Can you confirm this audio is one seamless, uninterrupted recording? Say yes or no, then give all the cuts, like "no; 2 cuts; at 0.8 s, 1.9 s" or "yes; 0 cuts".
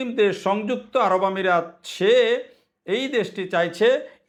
yes; 0 cuts